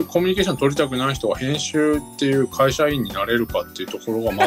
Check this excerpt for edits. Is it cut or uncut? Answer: uncut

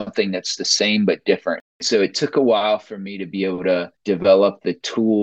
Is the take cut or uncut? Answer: cut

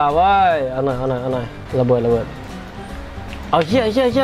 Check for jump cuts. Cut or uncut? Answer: cut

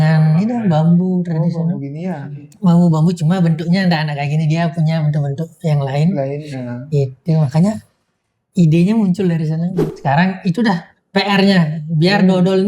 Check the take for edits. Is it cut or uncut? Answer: cut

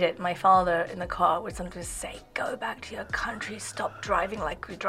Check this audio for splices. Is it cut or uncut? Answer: uncut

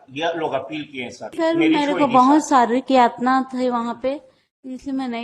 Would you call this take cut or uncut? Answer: cut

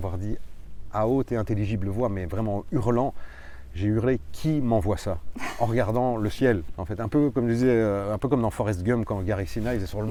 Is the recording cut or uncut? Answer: uncut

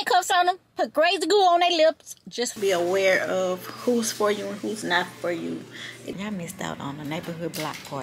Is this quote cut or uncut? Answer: cut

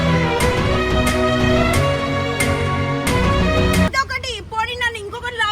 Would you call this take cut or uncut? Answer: cut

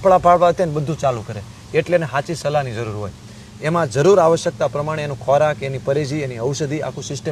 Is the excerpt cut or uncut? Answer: uncut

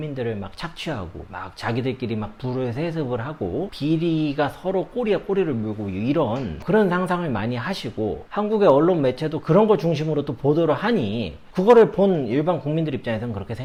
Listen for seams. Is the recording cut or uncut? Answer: uncut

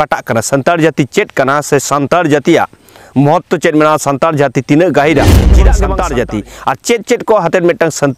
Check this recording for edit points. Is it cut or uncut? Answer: cut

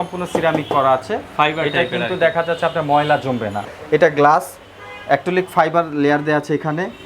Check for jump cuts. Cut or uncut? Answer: cut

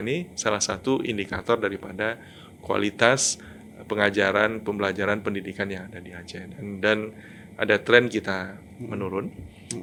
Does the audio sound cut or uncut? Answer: uncut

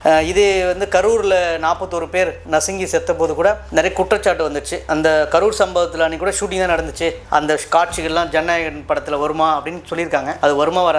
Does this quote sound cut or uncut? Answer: uncut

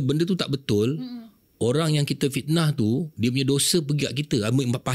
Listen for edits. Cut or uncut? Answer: uncut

